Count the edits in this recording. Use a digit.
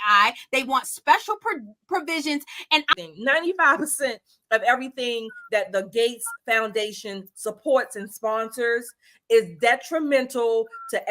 1